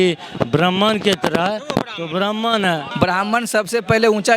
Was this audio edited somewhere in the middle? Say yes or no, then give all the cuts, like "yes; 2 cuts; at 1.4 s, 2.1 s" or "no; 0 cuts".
yes; 1 cut; at 2.9 s